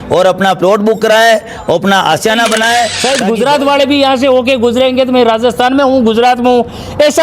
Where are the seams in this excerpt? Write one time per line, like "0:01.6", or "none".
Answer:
0:03.0

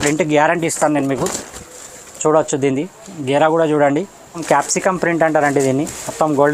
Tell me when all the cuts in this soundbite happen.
0:04.4

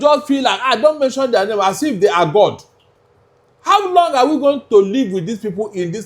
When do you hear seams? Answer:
none

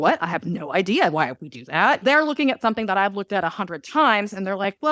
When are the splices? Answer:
0:02.0

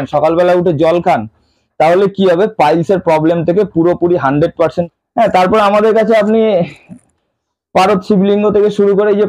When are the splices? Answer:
0:04.8

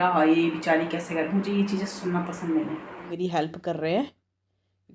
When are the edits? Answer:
0:03.1

